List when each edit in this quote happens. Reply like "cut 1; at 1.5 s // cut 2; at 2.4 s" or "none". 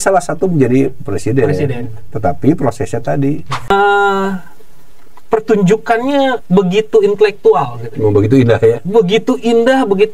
cut 1; at 3.7 s